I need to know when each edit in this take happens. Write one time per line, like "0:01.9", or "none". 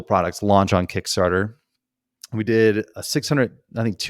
0:03.0